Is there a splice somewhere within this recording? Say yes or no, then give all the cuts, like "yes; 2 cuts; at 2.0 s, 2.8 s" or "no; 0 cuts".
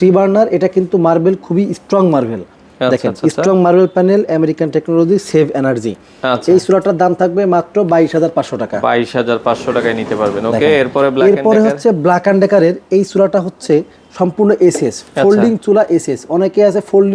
no; 0 cuts